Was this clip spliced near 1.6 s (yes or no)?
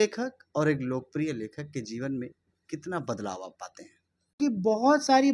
no